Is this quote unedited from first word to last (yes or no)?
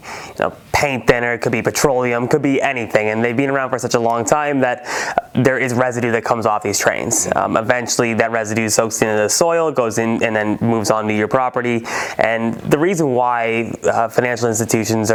yes